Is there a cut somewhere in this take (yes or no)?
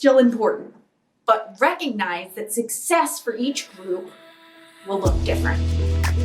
yes